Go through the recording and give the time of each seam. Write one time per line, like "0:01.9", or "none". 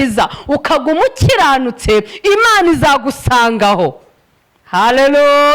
none